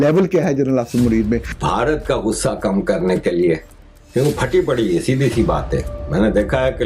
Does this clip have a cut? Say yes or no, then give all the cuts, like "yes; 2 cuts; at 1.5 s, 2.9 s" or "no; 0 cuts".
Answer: yes; 1 cut; at 1.5 s